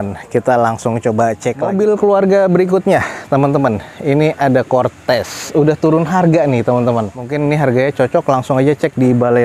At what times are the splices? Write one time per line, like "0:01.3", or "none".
0:01.6
0:07.2